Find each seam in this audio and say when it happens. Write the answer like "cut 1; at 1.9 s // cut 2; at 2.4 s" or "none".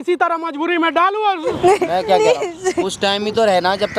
cut 1; at 1.6 s